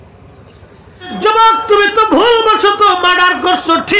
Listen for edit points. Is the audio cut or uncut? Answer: cut